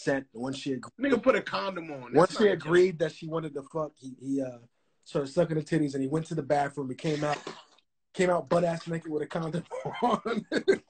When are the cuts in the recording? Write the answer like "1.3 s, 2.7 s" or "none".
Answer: none